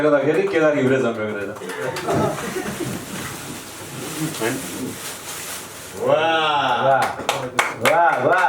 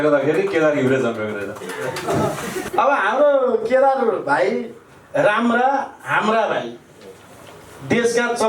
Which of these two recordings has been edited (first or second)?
second